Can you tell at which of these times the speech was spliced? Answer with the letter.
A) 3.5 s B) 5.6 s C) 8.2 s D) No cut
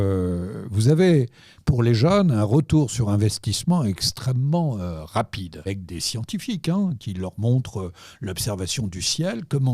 B